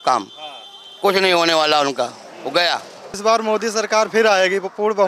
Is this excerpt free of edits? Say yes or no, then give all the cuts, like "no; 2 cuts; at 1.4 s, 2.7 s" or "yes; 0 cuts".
no; 1 cut; at 3.2 s